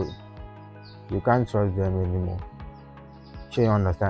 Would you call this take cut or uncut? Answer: uncut